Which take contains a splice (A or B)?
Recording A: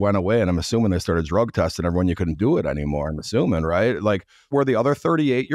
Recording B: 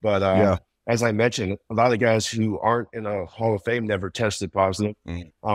A